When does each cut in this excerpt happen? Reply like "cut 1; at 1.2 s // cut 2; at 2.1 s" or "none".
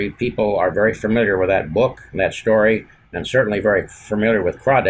none